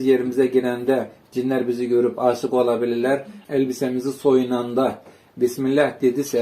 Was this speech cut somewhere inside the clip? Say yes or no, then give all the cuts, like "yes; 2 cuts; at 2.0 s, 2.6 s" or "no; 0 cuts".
yes; 1 cut; at 3.4 s